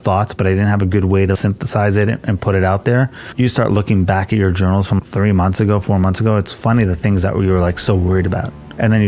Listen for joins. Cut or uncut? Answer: uncut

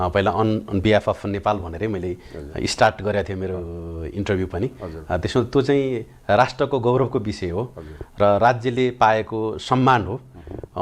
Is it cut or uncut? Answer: uncut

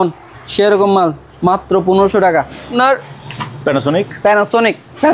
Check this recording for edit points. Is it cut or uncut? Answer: cut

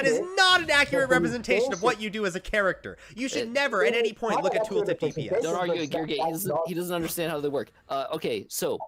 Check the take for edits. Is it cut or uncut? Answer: uncut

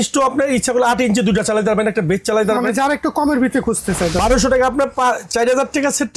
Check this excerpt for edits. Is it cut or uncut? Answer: cut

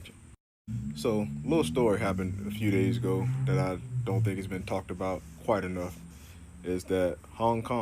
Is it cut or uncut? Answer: uncut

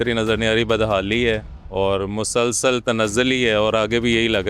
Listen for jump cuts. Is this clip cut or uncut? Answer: uncut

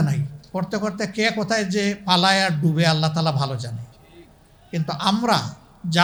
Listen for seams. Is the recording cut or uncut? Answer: uncut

